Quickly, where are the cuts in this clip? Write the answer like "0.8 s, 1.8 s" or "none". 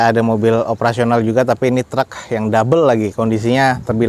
none